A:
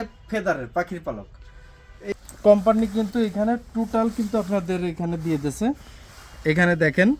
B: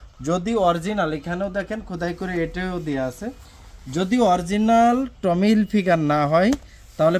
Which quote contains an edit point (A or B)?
A